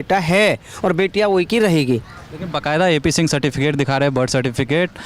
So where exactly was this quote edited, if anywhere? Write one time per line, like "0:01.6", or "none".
none